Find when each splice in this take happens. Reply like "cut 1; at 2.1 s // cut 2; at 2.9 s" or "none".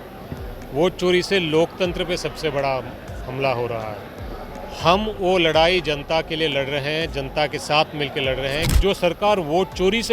cut 1; at 8.7 s